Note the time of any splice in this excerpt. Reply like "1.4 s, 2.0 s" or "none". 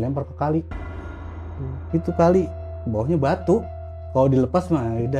none